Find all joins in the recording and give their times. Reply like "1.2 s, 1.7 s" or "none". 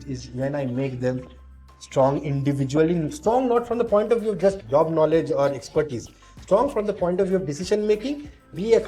4.6 s